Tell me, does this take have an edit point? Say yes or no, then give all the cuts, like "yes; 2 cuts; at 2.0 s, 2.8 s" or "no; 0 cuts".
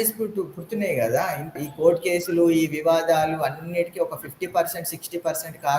yes; 1 cut; at 1.5 s